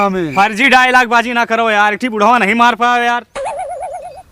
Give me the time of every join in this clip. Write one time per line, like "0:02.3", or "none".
0:03.3